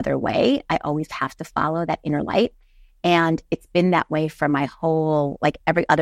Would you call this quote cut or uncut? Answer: uncut